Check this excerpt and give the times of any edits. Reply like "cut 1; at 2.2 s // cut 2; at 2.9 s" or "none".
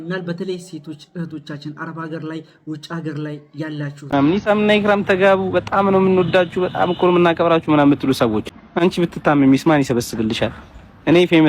cut 1; at 4.1 s // cut 2; at 8.6 s